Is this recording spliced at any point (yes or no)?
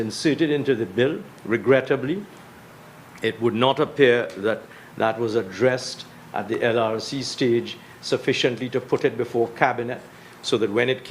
no